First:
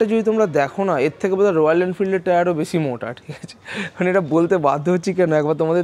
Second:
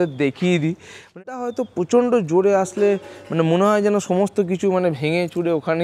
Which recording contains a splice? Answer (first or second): second